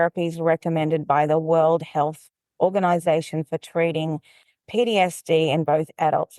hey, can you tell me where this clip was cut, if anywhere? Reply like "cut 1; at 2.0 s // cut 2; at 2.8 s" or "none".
none